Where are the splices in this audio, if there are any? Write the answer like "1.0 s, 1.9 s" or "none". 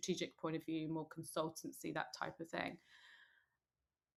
none